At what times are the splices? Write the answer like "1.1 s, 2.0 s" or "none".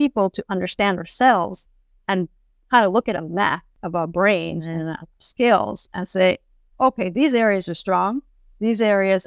3.7 s, 4.6 s